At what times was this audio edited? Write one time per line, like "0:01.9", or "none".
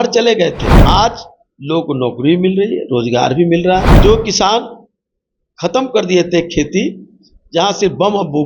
0:00.8
0:03.9